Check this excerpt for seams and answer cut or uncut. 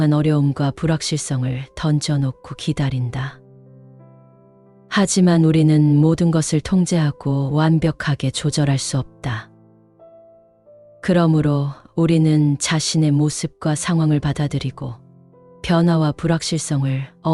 uncut